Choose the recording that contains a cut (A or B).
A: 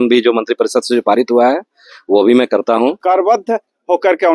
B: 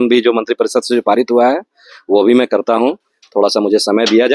A